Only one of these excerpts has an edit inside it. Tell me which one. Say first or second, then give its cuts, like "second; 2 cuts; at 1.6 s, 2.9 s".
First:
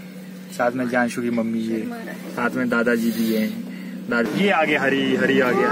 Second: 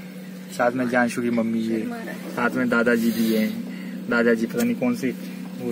first; 1 cut; at 4.2 s